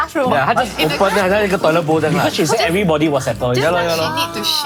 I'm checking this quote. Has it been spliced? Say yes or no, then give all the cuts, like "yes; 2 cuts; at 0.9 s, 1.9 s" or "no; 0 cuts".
no; 0 cuts